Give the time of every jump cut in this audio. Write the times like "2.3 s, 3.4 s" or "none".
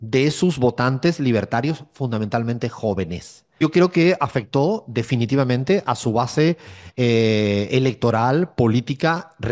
3.6 s